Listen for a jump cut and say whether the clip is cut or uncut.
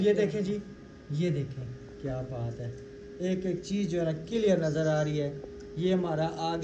uncut